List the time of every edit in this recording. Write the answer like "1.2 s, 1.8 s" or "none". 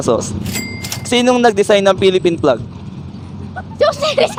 none